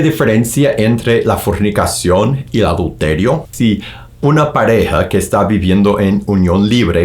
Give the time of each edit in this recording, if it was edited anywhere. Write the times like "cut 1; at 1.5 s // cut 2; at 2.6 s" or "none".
cut 1; at 3.5 s